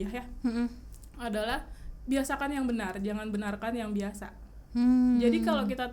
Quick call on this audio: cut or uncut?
uncut